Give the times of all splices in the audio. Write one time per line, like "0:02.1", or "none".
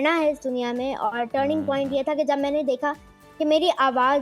none

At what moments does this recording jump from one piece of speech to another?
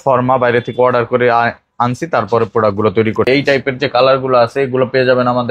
0:03.3

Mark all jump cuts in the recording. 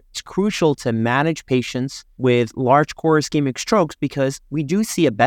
none

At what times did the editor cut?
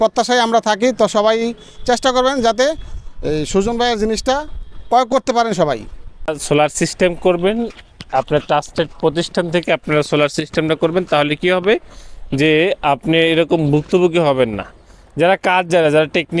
0:06.1

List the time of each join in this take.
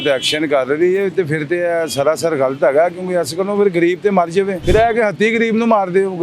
0:04.6

